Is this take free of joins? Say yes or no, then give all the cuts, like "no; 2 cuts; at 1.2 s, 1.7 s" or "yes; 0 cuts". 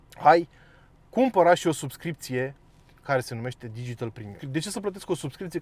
no; 1 cut; at 4.4 s